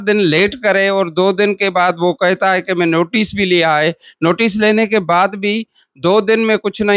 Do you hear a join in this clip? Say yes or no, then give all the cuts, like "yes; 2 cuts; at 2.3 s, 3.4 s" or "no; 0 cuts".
no; 0 cuts